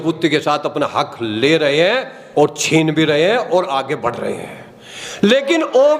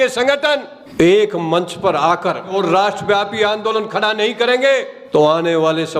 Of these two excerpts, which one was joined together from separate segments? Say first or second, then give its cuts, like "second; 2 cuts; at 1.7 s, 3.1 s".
second; 1 cut; at 2.5 s